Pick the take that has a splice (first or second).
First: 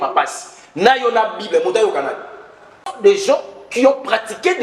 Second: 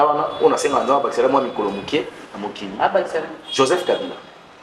first